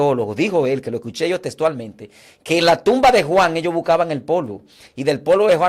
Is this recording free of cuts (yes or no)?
yes